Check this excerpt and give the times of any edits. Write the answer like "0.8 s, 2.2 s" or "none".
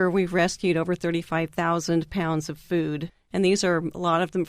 3.1 s